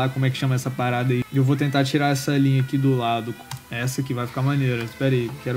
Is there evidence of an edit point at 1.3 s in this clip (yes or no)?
yes